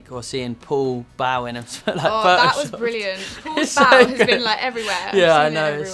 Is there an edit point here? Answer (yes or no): no